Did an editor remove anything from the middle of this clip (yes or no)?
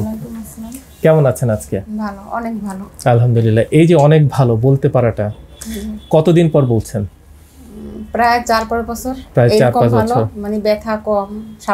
no